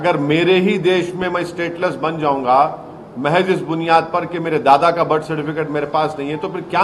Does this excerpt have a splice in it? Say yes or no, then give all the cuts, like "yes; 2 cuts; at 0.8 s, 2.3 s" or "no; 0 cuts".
no; 0 cuts